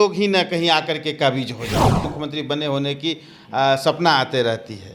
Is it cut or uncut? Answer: cut